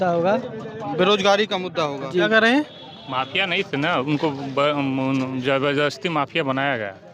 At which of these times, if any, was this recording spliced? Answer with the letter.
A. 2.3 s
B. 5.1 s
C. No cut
A